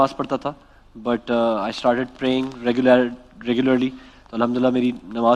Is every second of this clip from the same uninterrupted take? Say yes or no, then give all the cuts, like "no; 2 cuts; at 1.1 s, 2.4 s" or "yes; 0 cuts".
yes; 0 cuts